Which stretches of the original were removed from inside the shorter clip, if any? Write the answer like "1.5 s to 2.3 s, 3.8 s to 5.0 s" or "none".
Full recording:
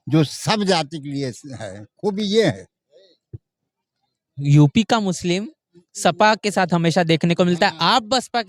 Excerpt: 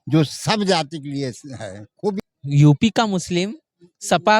2.2 s to 4.1 s

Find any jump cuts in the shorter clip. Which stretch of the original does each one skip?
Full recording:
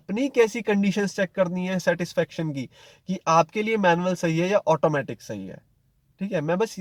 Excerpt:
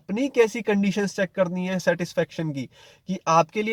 none

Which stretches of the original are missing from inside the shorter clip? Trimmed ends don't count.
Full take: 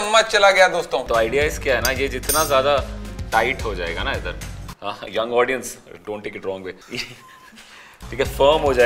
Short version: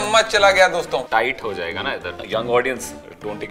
1.0 s to 3.2 s, 4.4 s to 5.0 s

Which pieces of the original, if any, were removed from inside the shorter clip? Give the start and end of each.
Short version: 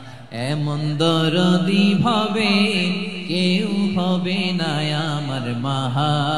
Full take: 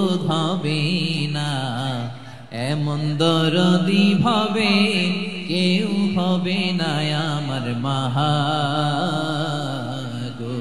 none

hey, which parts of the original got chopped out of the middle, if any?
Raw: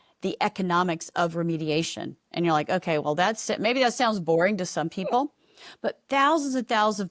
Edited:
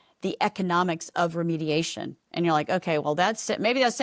none

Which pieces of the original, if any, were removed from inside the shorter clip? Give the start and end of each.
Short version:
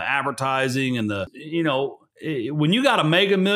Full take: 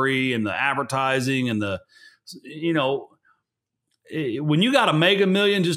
1.9 s to 2.5 s, 3.2 s to 4.0 s

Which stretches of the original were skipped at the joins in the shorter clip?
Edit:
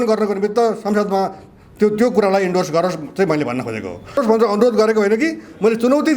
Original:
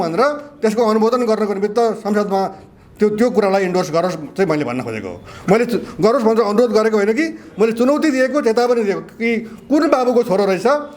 5.4 s to 6.1 s

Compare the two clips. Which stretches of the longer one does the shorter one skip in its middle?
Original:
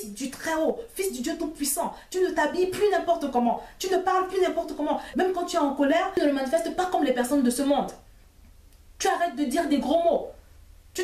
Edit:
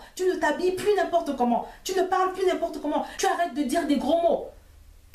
5.0 s to 8.9 s

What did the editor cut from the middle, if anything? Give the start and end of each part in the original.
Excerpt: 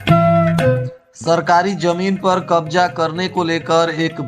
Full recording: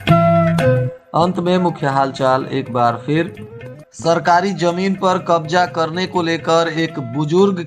1.0 s to 3.7 s

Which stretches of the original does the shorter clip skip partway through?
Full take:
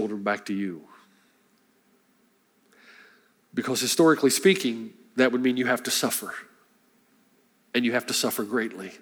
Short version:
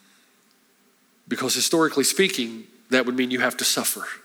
2.2 s to 3.4 s

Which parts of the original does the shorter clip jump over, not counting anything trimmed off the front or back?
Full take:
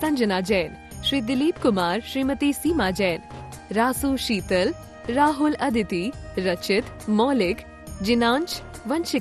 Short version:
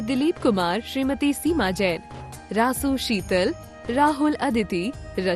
none

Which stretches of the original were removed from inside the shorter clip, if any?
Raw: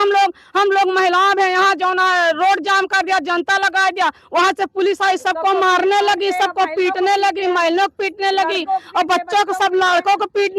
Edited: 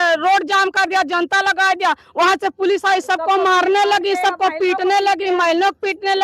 none

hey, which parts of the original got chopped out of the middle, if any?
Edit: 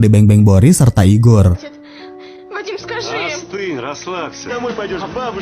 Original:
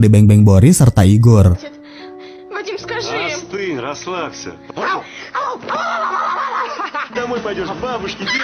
4.4 s to 7.1 s

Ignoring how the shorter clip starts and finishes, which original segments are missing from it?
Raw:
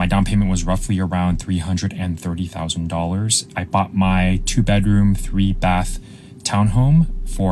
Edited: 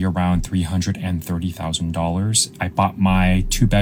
none

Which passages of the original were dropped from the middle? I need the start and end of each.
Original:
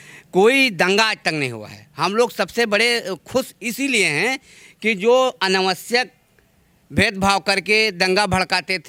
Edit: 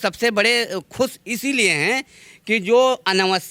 none

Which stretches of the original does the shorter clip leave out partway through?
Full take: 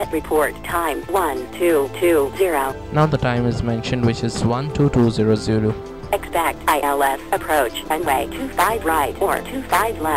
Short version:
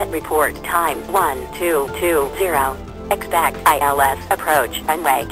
2.8 s to 5.9 s

